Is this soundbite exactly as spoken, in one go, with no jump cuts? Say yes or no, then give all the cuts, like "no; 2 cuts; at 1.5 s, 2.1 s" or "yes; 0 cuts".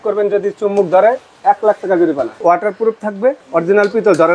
no; 2 cuts; at 2.4 s, 3.4 s